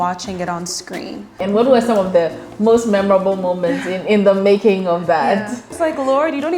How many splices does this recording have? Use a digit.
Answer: 2